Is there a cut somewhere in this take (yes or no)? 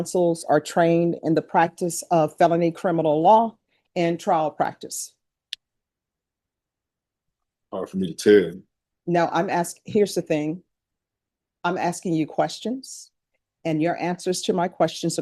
no